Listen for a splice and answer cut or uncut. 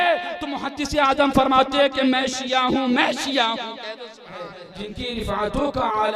cut